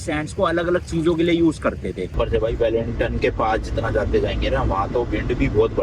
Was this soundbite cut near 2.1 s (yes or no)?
yes